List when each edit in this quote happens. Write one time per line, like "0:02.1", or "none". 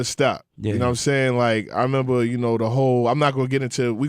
0:01.4